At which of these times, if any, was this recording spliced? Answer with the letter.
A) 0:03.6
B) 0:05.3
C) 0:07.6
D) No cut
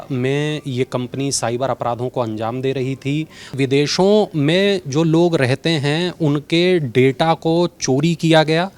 A